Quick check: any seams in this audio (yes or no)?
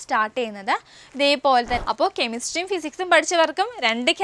yes